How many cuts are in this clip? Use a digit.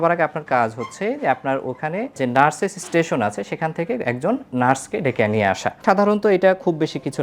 2